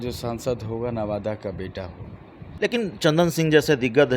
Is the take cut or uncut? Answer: cut